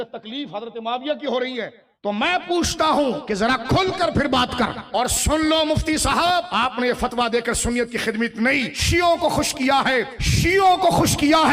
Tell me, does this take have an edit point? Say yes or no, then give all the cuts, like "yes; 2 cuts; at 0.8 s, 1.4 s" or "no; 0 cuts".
yes; 6 cuts; at 1.8 s, 3.2 s, 4.8 s, 6.5 s, 8.8 s, 10.2 s